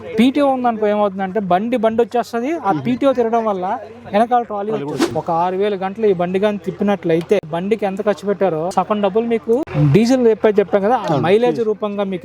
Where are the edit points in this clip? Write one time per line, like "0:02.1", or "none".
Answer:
0:05.1